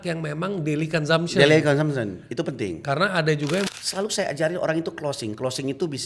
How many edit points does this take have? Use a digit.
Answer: 1